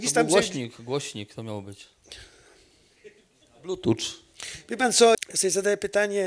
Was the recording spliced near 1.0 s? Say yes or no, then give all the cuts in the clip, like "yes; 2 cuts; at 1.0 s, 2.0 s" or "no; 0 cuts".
no; 1 cut; at 5.2 s